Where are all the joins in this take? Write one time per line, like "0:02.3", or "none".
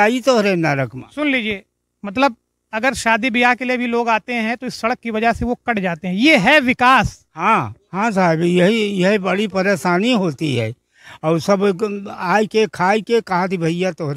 none